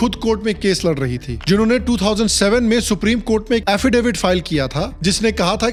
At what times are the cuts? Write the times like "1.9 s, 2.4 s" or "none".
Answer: none